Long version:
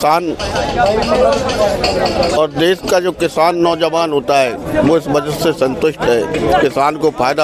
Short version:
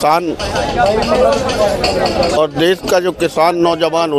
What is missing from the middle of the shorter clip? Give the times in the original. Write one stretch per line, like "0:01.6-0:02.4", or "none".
none